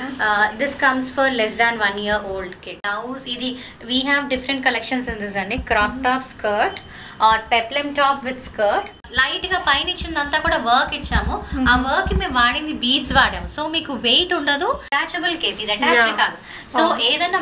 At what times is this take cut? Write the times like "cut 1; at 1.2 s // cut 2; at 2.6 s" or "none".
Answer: cut 1; at 2.8 s // cut 2; at 9.0 s // cut 3; at 14.9 s